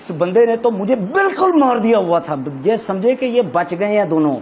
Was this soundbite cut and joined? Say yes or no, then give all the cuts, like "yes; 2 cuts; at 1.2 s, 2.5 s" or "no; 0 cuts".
no; 0 cuts